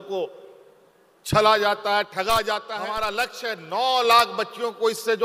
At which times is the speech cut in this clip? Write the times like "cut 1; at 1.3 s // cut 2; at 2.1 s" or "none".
cut 1; at 3.1 s